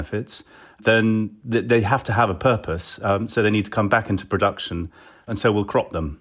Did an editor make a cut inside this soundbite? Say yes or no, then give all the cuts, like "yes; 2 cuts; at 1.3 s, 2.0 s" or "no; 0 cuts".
yes; 1 cut; at 5.3 s